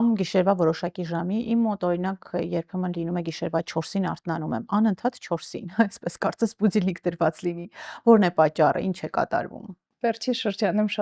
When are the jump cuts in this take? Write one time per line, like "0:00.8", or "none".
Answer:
none